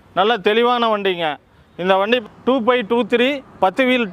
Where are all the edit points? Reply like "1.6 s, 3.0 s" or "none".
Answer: 2.2 s